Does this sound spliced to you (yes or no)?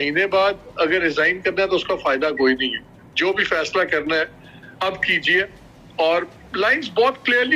no